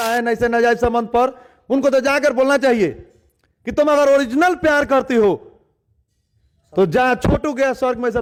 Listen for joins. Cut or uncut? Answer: uncut